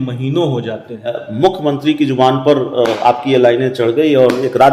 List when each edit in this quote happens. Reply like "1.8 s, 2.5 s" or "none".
1.2 s